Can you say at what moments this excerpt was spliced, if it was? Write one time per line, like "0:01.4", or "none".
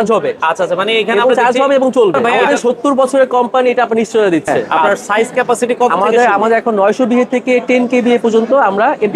0:02.3
0:04.6